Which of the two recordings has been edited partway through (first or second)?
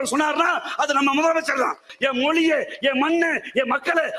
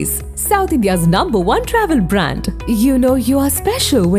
first